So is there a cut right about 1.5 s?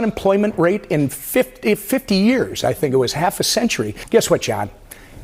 no; 1 cut; at 3.9 s

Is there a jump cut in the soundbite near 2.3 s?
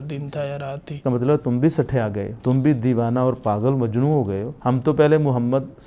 yes; 3 cuts; at 1.0 s, 2.3 s, 4.5 s

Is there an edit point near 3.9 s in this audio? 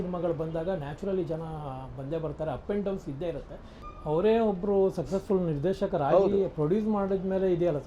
yes; 1 cut; at 3.9 s

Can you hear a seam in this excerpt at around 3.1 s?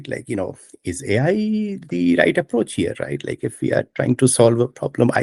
no; 0 cuts

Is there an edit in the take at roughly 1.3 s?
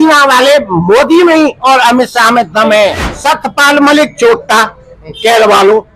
no; 1 cut; at 3.1 s

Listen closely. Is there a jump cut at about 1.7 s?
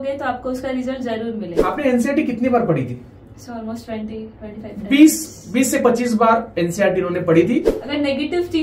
yes; 2 cuts; at 1.7 s, 7.8 s

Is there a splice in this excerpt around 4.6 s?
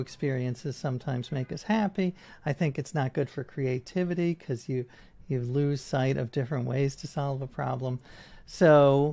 no; 0 cuts

